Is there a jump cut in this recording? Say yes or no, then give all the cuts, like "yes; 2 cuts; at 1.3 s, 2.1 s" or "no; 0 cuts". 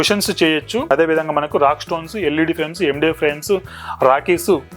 yes; 1 cut; at 0.9 s